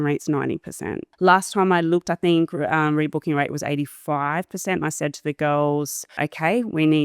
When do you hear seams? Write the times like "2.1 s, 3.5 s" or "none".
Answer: 1.0 s, 6.2 s